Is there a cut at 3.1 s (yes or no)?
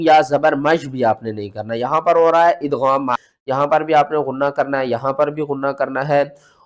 yes